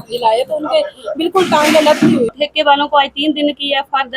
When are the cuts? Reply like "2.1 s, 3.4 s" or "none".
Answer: 2.3 s